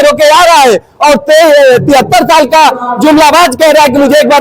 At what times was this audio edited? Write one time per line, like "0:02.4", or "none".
none